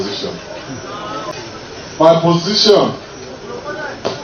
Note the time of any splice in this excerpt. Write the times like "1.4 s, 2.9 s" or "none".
1.3 s